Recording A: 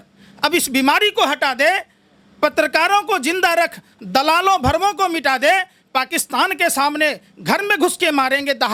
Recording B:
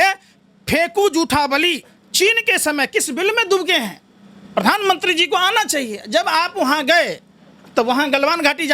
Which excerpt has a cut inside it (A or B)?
B